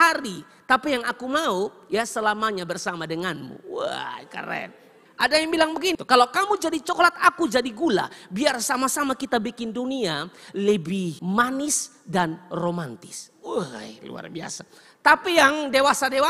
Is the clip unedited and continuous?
yes; 0 cuts

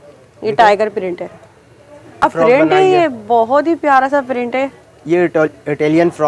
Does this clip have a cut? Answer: yes; 1 cut; at 2.2 s

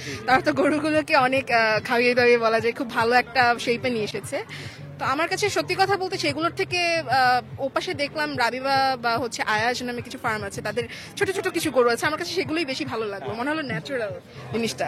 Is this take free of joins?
yes; 0 cuts

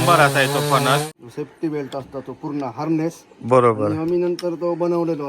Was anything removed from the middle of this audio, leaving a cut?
yes; 1 cut; at 1.1 s

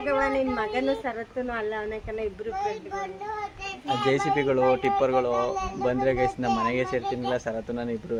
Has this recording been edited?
no; 0 cuts

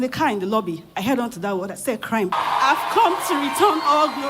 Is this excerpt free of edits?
no; 1 cut; at 2.3 s

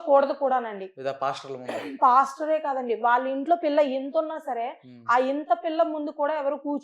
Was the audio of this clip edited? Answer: no; 0 cuts

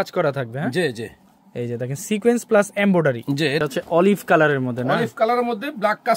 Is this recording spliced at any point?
yes; 1 cut; at 3.6 s

